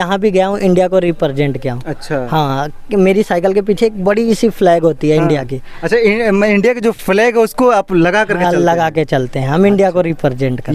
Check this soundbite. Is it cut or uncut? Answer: uncut